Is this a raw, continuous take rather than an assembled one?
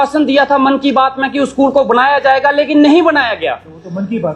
yes; 0 cuts

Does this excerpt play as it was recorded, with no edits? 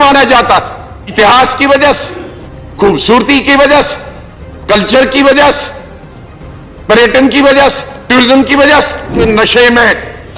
no; 2 cuts; at 1.1 s, 9.1 s

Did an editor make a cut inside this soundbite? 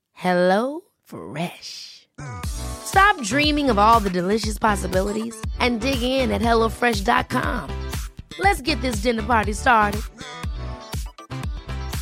no; 0 cuts

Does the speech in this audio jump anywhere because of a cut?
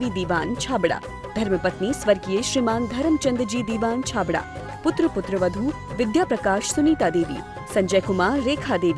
no; 0 cuts

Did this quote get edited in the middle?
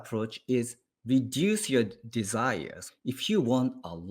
yes; 1 cut; at 2.9 s

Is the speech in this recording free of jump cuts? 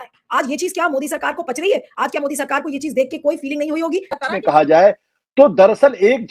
no; 1 cut; at 4.3 s

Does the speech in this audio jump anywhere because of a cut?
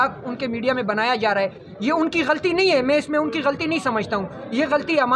no; 0 cuts

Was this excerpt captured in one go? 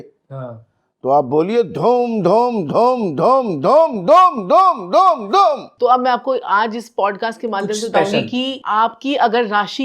no; 2 cuts; at 5.7 s, 8.6 s

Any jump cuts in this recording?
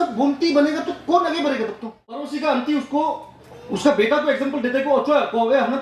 yes; 1 cut; at 2.3 s

